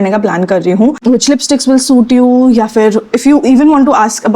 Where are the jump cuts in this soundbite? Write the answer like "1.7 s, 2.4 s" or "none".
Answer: 1.0 s